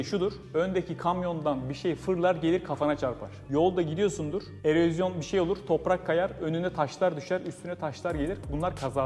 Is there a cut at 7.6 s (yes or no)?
no